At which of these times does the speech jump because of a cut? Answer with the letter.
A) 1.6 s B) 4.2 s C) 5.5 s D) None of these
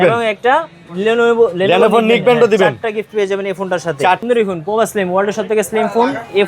B